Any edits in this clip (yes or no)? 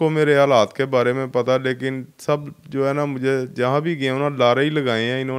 no